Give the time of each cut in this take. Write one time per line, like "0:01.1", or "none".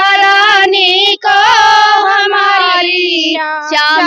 none